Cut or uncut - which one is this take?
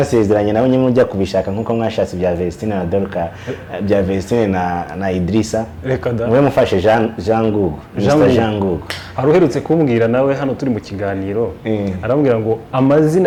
uncut